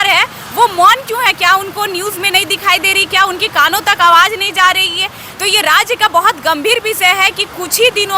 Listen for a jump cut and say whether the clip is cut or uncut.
uncut